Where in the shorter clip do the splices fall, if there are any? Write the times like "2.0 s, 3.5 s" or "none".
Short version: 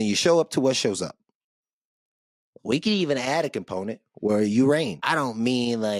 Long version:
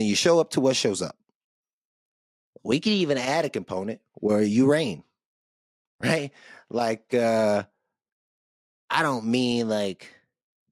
5.0 s